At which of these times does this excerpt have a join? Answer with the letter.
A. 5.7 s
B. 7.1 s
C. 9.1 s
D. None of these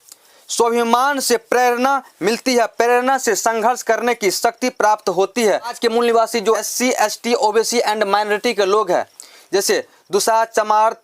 A